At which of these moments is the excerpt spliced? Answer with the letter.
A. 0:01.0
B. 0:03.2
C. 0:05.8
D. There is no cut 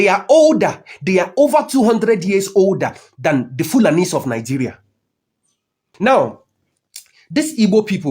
C